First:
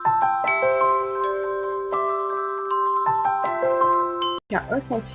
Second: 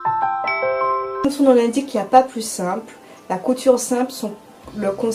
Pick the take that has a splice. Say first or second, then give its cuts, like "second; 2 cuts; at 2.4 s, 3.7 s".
second; 2 cuts; at 1.1 s, 3.2 s